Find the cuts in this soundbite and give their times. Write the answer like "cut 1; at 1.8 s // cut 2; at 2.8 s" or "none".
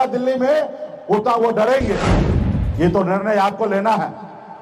cut 1; at 2.2 s